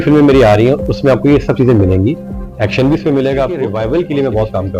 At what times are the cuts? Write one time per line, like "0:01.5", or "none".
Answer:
0:03.6